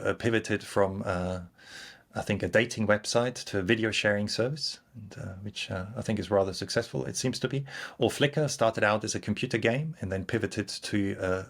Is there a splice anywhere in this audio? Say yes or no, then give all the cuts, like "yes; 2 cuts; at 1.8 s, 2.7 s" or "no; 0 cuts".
no; 0 cuts